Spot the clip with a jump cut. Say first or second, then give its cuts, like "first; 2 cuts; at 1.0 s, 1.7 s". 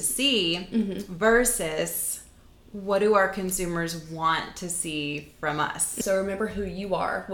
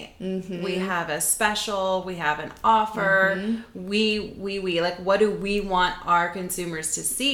first; 1 cut; at 6.0 s